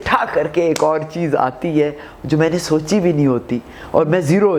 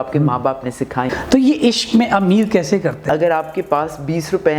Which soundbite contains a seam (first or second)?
second